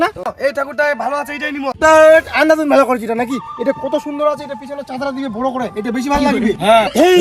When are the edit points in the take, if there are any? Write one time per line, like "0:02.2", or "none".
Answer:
none